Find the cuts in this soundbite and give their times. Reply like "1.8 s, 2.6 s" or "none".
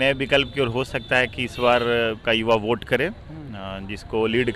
none